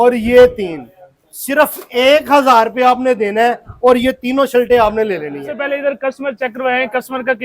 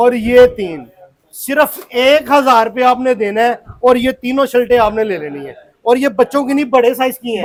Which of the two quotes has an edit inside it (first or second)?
first